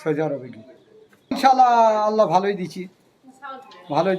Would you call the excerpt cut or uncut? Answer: cut